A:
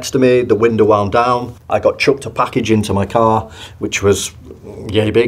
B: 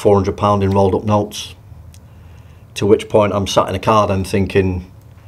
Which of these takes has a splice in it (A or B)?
A